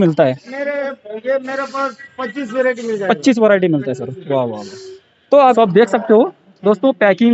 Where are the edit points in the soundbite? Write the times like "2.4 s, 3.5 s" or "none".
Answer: 5.5 s